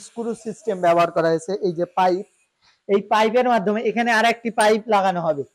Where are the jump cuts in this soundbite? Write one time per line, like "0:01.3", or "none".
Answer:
none